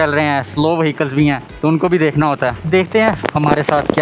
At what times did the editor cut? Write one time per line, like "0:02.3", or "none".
0:01.5
0:02.6